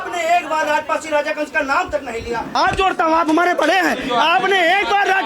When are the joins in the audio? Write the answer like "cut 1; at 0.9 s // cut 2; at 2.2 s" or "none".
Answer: cut 1; at 2.5 s